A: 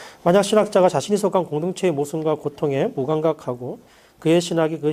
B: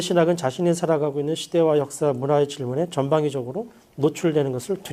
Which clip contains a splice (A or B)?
A